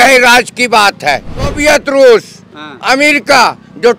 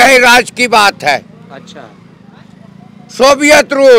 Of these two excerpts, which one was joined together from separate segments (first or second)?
first